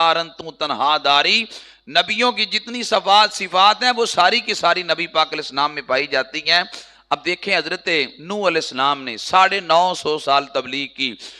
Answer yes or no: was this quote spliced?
no